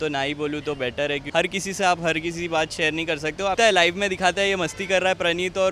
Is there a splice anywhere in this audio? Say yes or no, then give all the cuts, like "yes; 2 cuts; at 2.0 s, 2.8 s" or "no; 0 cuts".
yes; 2 cuts; at 1.2 s, 3.6 s